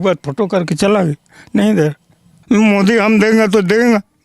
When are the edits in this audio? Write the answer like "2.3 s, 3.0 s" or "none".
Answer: 2.4 s